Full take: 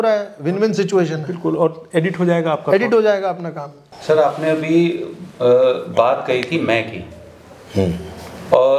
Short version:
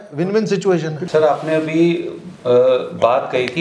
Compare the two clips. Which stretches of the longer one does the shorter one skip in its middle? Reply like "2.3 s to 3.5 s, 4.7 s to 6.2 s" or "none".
1.2 s to 3.9 s